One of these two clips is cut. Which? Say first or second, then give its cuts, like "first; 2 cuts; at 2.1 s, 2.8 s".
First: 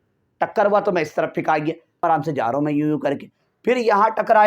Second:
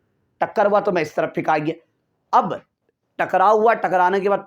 first; 1 cut; at 2.0 s